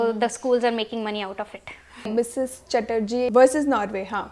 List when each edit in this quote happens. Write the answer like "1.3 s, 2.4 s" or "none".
2.1 s, 3.3 s